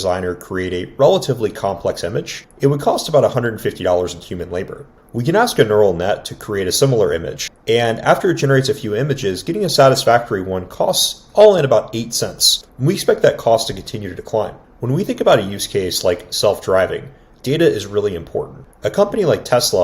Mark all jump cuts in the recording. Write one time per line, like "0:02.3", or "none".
0:14.6